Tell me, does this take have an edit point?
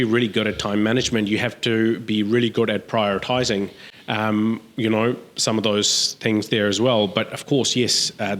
no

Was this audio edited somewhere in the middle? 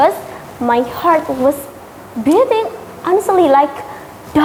no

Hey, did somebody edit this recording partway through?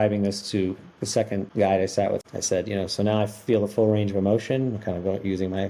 yes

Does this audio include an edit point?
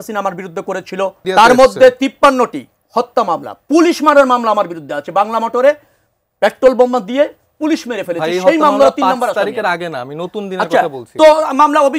yes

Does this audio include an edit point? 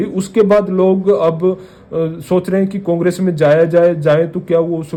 no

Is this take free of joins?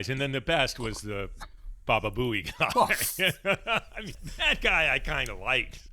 no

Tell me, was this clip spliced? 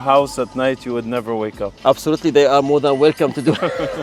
no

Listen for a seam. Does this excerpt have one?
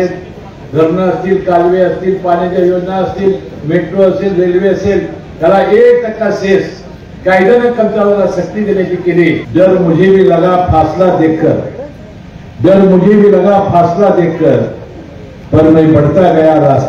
yes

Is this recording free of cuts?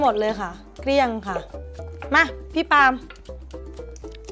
no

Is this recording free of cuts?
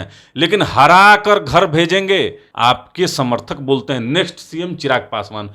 no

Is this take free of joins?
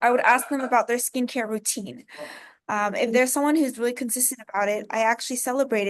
yes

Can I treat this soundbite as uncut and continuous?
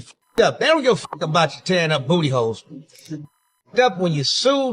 yes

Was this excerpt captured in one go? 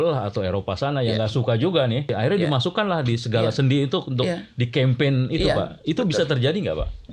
no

